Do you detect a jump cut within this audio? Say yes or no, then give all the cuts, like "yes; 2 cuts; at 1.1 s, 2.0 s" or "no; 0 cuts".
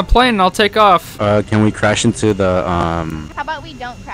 yes; 1 cut; at 1.1 s